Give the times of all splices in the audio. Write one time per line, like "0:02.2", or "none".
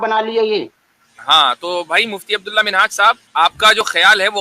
0:03.2